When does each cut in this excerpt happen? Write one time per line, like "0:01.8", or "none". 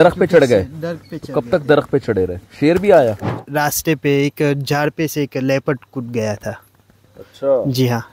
0:03.3